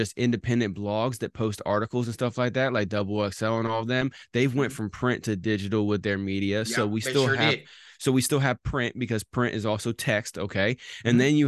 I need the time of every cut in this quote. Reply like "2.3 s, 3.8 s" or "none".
none